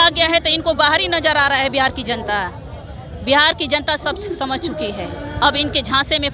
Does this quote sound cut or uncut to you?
uncut